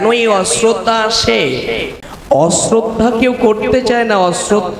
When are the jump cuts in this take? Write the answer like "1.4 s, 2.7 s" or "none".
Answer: 1.9 s